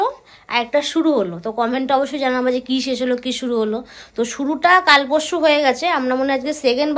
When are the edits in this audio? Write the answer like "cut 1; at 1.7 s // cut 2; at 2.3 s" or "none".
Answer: none